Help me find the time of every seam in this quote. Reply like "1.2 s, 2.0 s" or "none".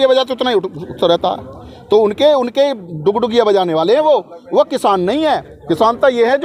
none